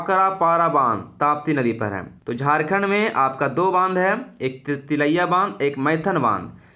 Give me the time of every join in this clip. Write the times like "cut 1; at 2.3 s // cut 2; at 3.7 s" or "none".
cut 1; at 2.1 s